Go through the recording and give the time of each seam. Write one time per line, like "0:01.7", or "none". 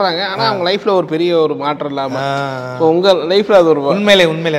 none